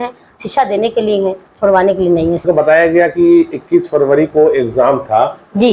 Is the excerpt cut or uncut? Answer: cut